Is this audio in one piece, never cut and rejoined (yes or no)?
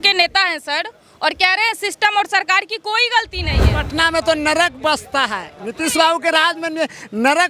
no